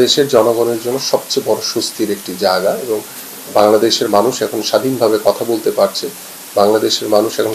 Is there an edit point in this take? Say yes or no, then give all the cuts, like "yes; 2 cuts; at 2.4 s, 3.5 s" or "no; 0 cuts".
no; 0 cuts